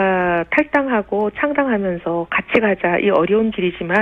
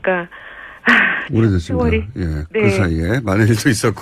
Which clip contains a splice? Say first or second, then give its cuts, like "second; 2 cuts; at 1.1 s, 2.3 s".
second; 1 cut; at 2.5 s